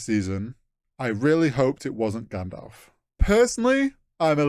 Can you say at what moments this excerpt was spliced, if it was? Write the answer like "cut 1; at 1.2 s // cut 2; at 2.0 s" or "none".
cut 1; at 3.1 s